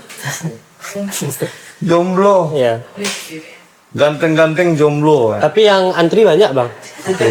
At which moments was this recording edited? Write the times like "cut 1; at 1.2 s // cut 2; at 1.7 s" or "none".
none

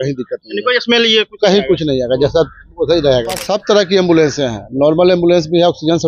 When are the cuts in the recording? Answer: cut 1; at 3.4 s

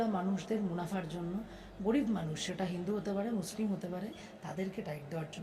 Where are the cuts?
cut 1; at 4.2 s

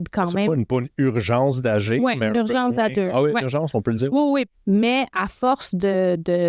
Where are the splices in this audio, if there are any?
cut 1; at 4.5 s

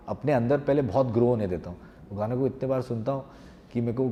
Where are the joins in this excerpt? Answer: none

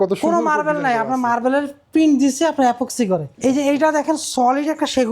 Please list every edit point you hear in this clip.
cut 1; at 3.3 s

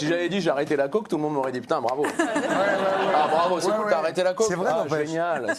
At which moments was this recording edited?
none

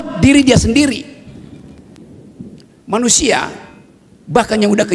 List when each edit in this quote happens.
none

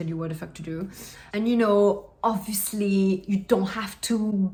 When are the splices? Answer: none

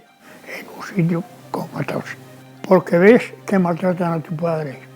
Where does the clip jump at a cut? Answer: cut 1; at 2.1 s

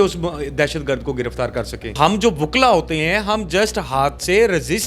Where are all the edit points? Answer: cut 1; at 2.0 s

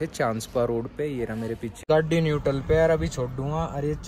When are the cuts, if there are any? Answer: cut 1; at 1.8 s

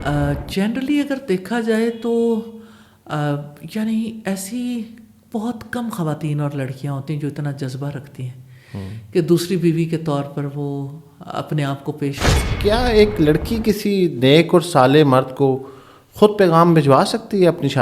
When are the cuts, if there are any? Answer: cut 1; at 12.5 s

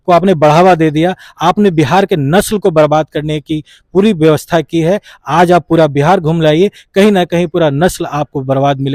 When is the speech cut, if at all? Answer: none

